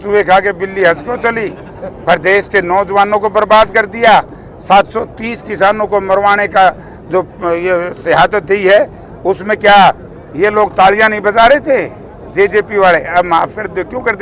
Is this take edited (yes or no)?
no